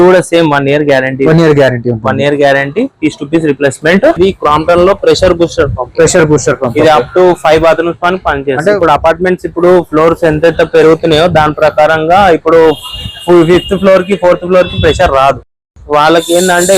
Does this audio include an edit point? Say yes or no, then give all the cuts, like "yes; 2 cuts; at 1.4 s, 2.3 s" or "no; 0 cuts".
yes; 2 cuts; at 4.2 s, 8.8 s